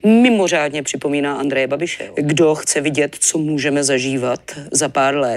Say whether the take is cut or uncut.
cut